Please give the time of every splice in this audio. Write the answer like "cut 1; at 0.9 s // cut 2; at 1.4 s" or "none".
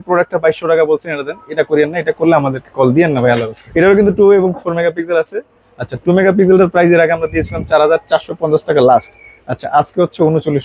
cut 1; at 3.6 s